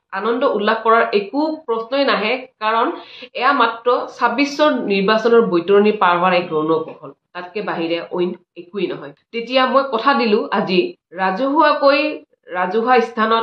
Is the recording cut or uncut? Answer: cut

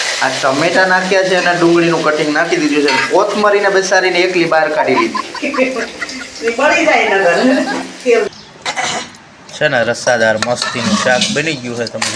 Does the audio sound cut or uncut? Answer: cut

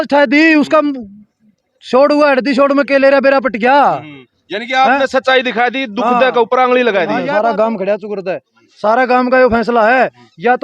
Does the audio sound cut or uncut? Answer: cut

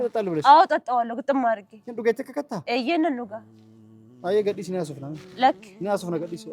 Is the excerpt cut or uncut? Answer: uncut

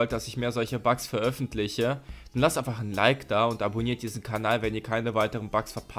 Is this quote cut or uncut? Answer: uncut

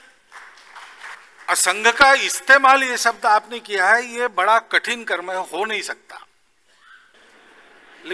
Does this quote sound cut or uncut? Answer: cut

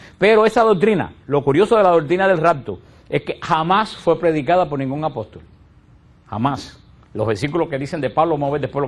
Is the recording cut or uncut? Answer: cut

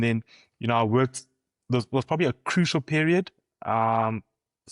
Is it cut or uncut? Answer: uncut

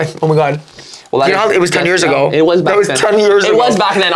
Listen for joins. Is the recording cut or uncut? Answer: uncut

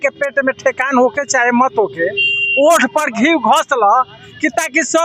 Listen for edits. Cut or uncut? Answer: uncut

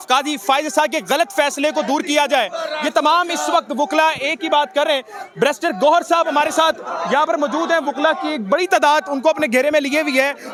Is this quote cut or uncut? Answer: uncut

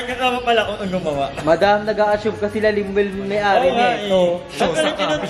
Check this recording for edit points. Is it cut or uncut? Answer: uncut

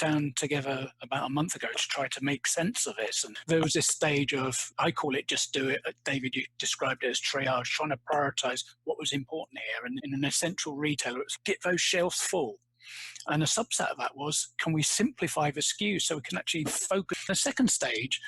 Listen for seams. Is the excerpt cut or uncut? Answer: cut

